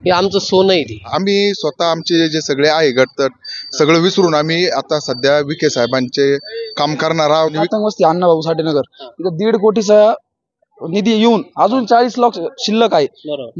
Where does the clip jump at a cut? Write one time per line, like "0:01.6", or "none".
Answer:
0:01.1
0:07.5